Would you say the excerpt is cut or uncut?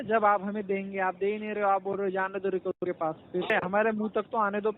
cut